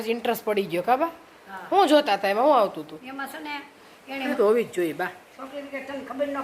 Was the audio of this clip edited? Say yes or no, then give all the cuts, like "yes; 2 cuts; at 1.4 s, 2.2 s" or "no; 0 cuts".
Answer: yes; 1 cut; at 4.3 s